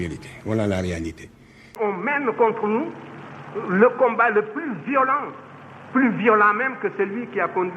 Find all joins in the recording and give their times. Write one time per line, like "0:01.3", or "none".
0:01.8